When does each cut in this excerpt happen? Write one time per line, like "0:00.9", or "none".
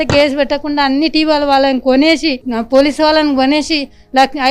none

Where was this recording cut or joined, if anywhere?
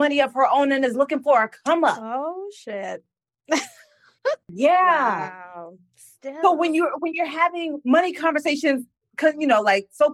0:04.5

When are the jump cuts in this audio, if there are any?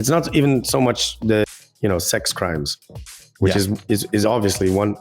0:01.4

